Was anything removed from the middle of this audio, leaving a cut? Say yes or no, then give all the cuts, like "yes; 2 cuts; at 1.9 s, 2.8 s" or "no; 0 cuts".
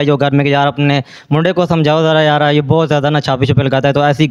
no; 0 cuts